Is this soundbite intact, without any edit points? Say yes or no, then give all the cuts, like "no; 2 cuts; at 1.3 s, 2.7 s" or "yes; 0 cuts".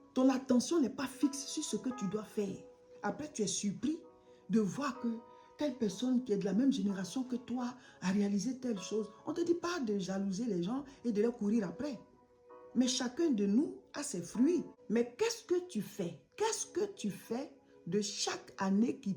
no; 1 cut; at 14.8 s